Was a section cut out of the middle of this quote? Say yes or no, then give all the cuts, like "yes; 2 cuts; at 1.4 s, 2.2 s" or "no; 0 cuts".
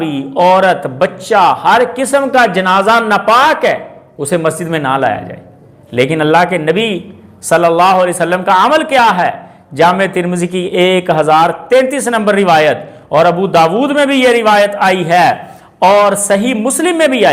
no; 0 cuts